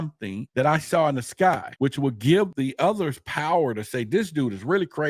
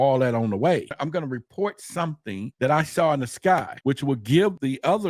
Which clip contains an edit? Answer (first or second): second